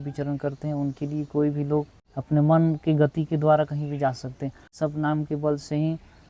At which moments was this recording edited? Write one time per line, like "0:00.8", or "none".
0:02.0
0:04.7